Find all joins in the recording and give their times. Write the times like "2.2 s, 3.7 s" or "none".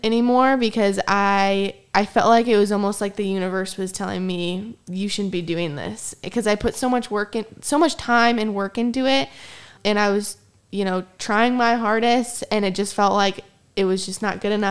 9.7 s